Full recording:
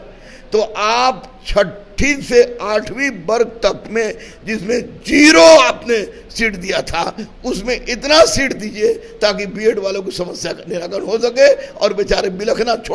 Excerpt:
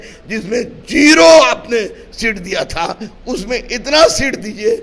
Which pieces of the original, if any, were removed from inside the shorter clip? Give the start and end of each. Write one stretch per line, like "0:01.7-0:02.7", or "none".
none